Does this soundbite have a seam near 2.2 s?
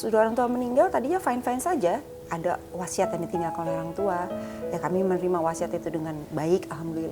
yes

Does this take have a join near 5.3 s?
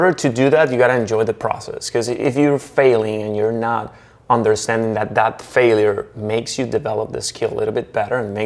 no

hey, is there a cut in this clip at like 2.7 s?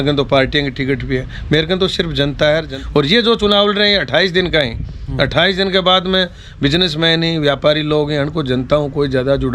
yes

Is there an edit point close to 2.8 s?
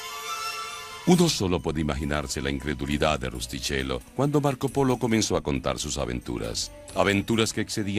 no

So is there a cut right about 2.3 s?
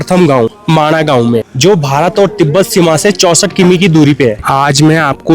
no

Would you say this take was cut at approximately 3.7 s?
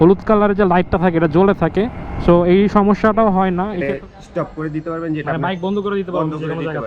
yes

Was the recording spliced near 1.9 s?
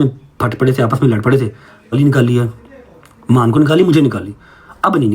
yes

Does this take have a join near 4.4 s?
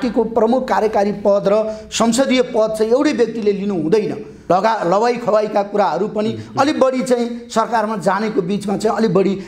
yes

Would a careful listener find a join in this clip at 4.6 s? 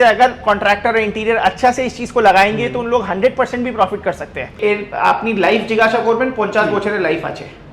yes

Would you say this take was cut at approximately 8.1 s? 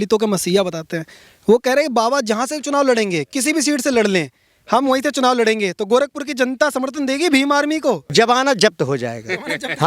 yes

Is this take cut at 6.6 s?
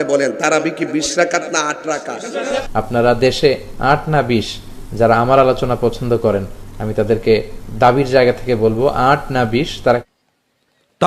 no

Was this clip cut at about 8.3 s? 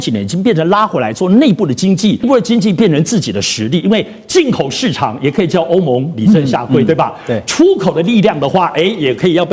no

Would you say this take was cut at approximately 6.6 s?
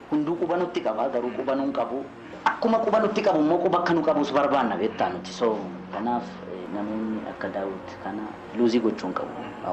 yes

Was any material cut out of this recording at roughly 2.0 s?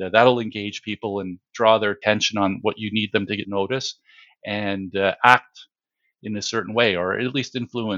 yes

